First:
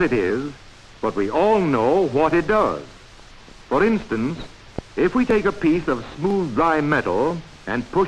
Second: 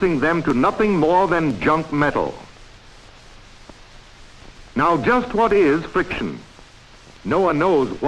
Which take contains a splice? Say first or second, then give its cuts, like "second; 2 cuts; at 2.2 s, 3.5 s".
second; 1 cut; at 5.4 s